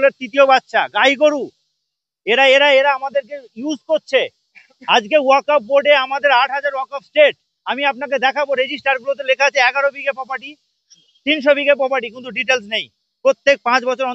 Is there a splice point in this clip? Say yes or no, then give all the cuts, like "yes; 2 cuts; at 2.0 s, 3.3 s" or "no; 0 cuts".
no; 0 cuts